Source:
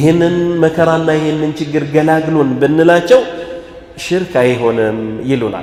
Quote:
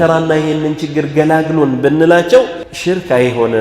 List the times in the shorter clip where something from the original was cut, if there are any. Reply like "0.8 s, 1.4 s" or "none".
2.7 s